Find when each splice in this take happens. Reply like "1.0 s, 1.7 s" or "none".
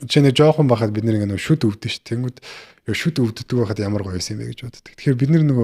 none